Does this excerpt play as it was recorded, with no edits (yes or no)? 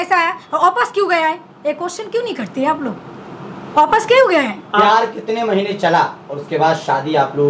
yes